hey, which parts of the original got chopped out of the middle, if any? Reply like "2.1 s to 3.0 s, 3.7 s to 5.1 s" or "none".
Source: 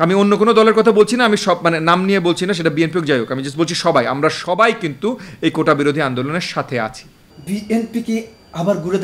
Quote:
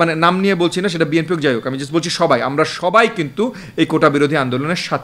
none